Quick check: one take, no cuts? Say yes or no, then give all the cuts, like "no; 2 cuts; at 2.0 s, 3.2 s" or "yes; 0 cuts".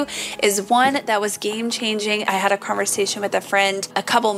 no; 1 cut; at 2.2 s